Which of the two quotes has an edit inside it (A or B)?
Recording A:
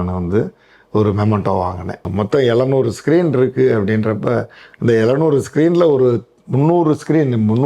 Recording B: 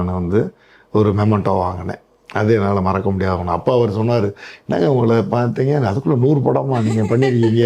A